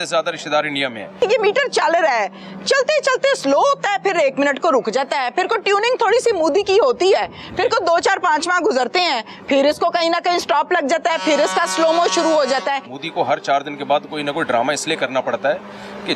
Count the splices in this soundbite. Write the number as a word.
two